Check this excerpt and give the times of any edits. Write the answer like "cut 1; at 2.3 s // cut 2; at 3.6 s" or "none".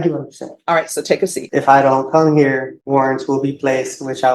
cut 1; at 1.3 s // cut 2; at 2.7 s